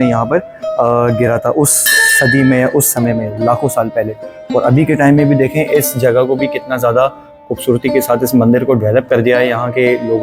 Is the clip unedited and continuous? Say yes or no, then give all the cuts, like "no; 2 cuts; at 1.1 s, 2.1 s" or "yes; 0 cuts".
yes; 0 cuts